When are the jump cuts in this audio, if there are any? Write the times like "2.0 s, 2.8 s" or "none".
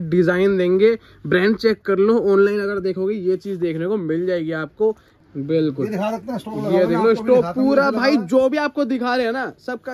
5.2 s